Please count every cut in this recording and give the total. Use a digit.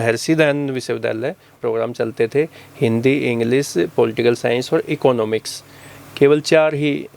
1